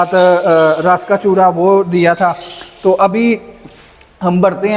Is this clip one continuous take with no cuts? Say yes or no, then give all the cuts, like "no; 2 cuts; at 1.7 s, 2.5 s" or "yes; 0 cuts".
yes; 0 cuts